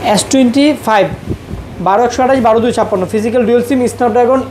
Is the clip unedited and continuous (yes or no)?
yes